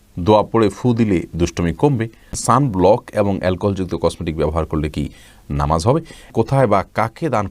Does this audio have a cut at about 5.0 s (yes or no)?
no